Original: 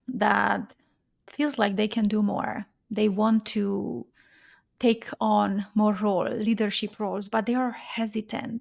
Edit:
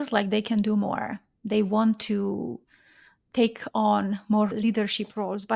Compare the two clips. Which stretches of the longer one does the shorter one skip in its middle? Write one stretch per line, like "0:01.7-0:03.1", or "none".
0:06.0-0:06.4